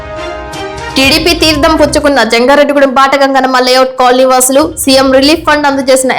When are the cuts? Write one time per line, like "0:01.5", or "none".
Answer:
0:00.9